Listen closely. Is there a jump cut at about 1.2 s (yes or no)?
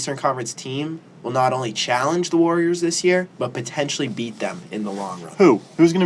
no